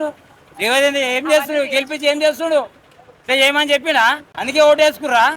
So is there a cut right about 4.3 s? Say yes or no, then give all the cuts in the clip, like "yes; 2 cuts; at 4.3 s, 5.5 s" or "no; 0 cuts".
yes; 1 cut; at 4.3 s